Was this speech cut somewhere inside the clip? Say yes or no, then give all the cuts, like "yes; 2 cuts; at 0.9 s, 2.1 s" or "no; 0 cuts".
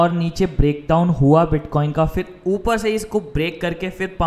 no; 0 cuts